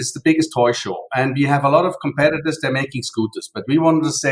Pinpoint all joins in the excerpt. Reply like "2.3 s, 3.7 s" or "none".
none